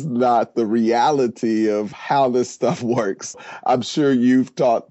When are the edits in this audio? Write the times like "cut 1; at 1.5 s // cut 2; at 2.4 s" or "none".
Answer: cut 1; at 3.3 s